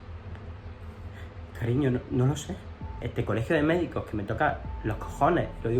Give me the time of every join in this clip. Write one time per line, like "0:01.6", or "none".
0:03.0